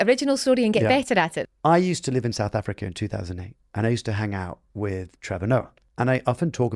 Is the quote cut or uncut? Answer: cut